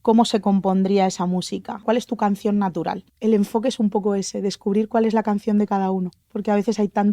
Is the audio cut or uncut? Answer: cut